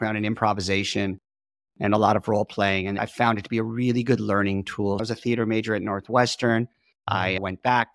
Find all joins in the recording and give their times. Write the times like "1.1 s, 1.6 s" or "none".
3.0 s, 5.0 s